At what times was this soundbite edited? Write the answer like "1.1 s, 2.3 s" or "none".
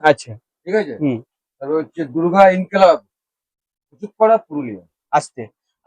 4.9 s